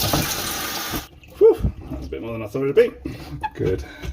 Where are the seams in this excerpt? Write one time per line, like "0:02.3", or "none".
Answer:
0:01.1
0:03.3